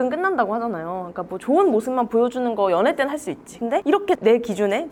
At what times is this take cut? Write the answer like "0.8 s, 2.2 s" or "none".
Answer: none